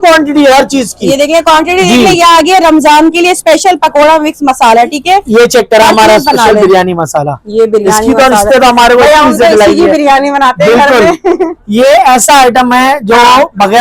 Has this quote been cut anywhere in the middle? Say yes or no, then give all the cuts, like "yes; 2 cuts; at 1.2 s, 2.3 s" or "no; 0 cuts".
no; 0 cuts